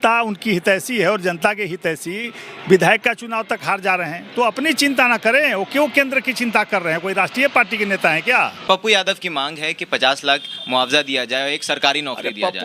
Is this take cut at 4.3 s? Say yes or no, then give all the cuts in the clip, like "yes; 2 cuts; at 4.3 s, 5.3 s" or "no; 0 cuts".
no; 1 cut; at 8.6 s